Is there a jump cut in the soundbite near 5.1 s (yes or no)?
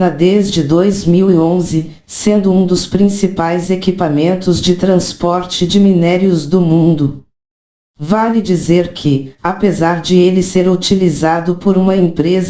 yes